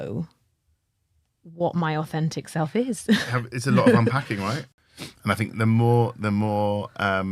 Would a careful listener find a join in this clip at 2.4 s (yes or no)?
no